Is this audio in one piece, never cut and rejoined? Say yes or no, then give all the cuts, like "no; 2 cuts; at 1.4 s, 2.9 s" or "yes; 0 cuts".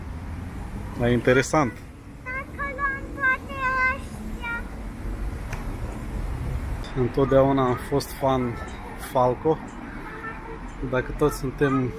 no; 1 cut; at 6.9 s